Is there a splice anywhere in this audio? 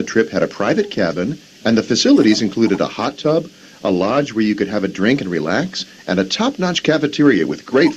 yes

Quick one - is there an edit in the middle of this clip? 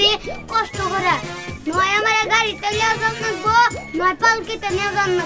no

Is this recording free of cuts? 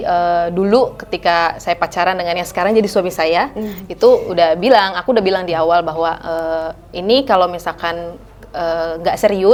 yes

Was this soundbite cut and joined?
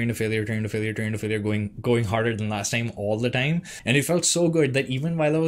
yes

